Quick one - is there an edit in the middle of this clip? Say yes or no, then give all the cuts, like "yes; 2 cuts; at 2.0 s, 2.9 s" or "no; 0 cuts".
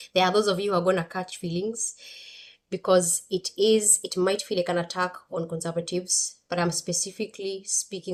no; 0 cuts